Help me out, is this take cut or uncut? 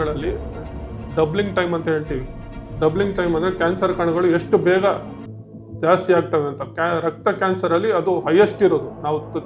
uncut